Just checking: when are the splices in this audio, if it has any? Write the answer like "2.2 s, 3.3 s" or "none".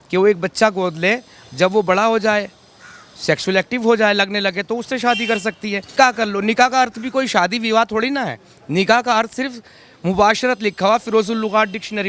5.9 s